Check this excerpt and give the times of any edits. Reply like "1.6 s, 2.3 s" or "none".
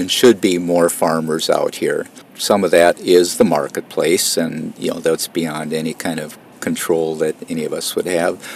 none